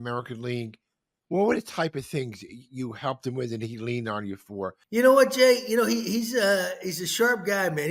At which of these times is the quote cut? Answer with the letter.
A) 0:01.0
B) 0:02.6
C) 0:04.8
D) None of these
C